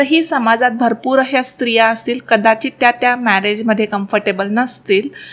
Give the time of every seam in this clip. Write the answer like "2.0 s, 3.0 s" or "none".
none